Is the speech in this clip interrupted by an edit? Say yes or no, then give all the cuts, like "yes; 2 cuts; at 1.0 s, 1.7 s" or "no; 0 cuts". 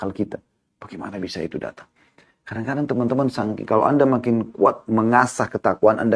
no; 0 cuts